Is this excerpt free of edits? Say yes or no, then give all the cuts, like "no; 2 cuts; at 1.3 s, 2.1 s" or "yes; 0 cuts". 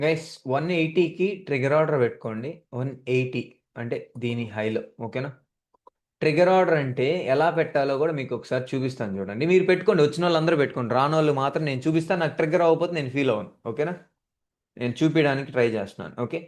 yes; 0 cuts